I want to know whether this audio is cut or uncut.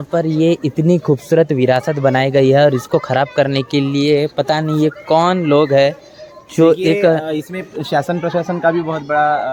uncut